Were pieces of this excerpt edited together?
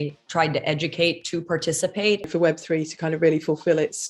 yes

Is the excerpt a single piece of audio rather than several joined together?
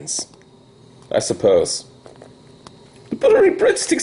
no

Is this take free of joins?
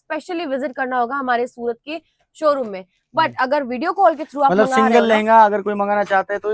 yes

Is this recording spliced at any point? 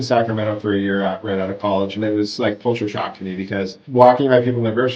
no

